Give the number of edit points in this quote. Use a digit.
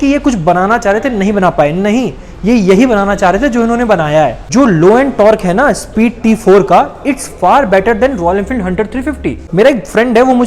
2